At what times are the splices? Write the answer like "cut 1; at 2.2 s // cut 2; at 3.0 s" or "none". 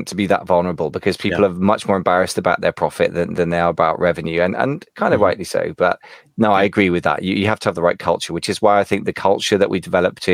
none